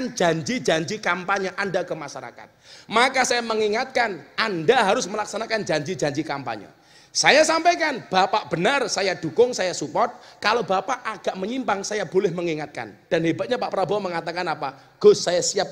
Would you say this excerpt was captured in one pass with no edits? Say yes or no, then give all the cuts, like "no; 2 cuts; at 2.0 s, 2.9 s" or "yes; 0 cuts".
yes; 0 cuts